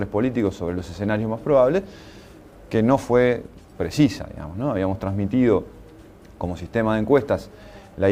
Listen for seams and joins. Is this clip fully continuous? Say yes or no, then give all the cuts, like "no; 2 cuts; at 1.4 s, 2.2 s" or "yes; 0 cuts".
yes; 0 cuts